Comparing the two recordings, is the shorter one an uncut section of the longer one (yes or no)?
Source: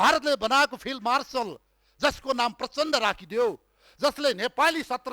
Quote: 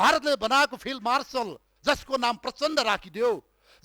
no